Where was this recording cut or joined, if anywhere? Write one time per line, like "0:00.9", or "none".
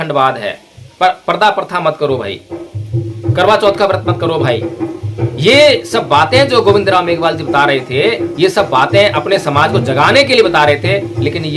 none